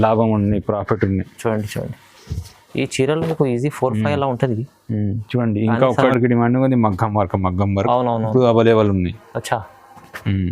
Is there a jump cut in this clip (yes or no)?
yes